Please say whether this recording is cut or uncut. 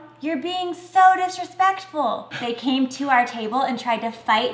cut